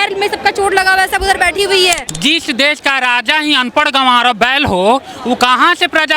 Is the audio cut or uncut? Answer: cut